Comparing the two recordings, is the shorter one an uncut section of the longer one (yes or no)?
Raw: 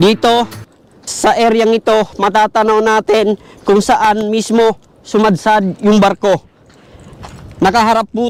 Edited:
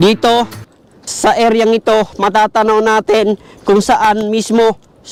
yes